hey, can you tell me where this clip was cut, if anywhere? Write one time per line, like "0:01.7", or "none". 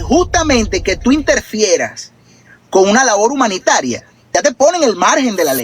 0:04.2